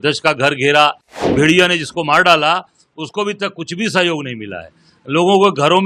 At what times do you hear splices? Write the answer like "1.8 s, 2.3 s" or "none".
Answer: 1.3 s